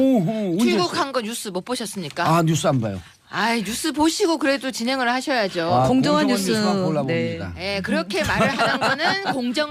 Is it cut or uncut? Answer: uncut